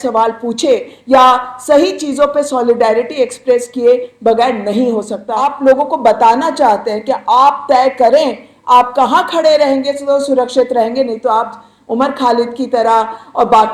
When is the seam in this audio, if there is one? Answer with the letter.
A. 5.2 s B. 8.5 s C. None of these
A